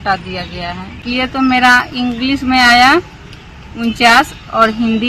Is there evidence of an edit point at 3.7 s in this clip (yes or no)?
no